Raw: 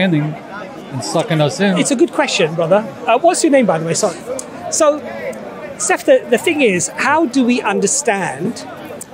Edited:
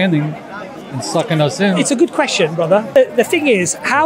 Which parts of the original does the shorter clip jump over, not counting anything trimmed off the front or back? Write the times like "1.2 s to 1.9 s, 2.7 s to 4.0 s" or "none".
2.9 s to 6.0 s

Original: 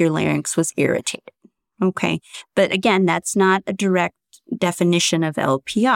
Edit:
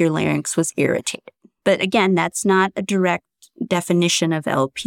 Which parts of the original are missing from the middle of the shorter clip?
1.4 s to 2.3 s

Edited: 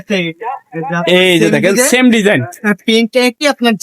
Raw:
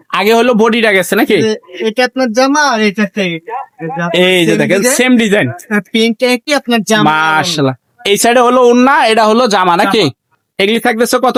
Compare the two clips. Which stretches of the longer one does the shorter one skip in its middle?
none

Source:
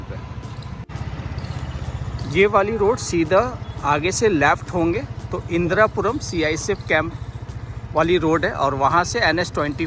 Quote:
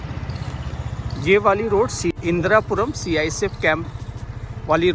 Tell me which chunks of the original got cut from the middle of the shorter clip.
3.2 s to 5.4 s

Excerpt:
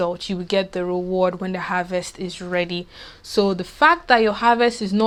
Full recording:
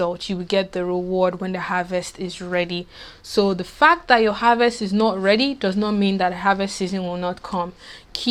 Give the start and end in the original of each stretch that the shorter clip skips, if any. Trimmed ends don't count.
none

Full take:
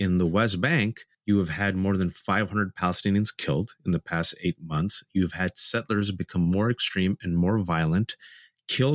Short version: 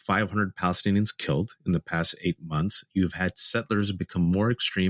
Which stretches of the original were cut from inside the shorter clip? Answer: none

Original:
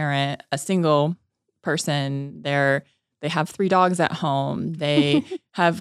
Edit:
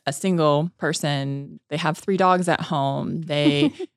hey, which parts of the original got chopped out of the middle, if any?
1.7 s to 2.8 s

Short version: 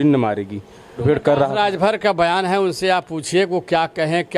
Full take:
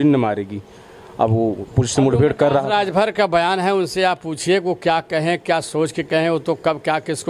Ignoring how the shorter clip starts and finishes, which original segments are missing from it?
1.0 s to 2.1 s

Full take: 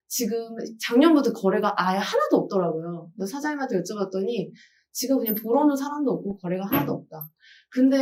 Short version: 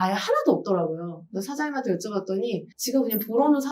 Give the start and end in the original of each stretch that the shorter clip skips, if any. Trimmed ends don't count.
4.6 s to 4.9 s

